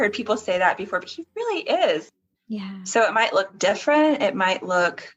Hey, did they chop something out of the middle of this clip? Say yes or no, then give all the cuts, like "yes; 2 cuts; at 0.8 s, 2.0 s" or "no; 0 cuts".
yes; 1 cut; at 2.2 s